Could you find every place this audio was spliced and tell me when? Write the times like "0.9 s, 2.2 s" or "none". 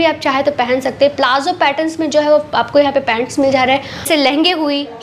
4.1 s